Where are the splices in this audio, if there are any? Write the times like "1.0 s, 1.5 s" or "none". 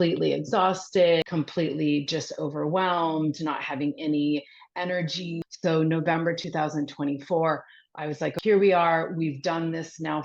1.2 s, 5.4 s, 8.3 s